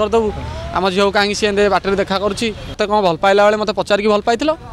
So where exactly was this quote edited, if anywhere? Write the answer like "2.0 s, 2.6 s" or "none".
2.8 s